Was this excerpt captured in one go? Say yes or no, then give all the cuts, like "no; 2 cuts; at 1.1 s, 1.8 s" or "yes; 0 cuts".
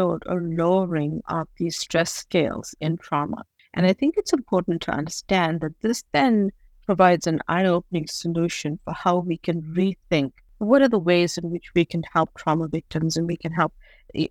yes; 0 cuts